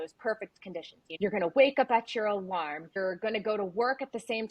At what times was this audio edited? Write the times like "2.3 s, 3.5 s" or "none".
1.0 s, 3.0 s